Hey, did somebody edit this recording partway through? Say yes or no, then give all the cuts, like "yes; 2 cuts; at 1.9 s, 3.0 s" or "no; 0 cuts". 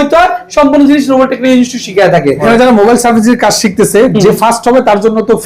yes; 1 cut; at 2.5 s